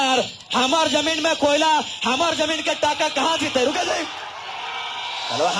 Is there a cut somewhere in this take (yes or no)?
no